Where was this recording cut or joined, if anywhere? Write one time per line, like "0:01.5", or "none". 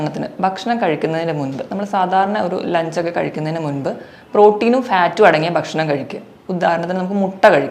none